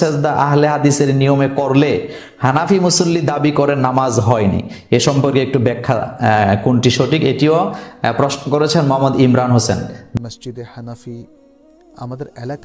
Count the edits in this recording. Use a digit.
1